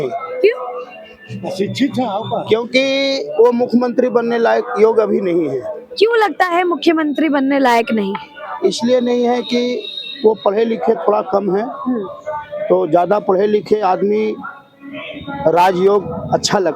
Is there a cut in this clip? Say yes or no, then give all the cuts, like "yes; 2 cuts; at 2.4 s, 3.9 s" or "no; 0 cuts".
no; 0 cuts